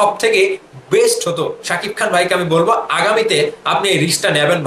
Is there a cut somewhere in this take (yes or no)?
no